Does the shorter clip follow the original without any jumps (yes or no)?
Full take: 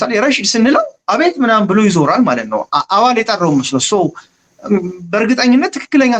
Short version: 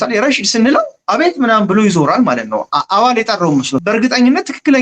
no